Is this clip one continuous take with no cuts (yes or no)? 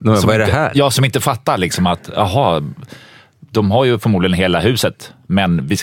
yes